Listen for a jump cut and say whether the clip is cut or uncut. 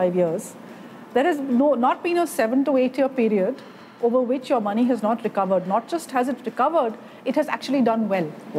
uncut